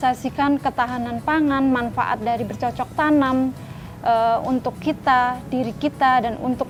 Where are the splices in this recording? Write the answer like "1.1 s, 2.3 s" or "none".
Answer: none